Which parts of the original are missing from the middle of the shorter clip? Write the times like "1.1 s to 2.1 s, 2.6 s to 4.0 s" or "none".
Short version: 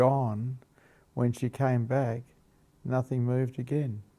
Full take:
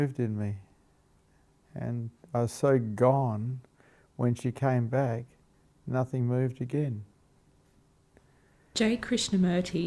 none